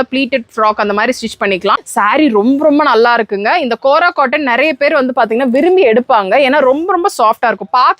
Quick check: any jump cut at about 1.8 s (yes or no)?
yes